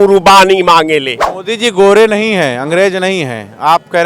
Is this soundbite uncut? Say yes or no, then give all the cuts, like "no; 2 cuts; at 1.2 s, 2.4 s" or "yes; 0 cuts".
no; 1 cut; at 1.3 s